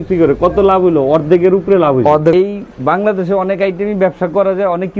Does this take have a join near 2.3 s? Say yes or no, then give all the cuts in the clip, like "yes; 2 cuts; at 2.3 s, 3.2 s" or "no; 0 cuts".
yes; 1 cut; at 2.3 s